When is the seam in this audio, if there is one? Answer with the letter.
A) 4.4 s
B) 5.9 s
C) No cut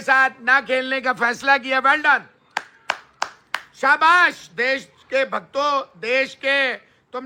C